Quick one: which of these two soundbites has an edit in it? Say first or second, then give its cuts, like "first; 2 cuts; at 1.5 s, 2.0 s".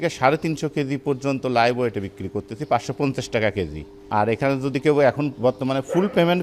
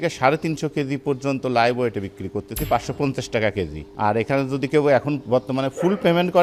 second; 1 cut; at 3.8 s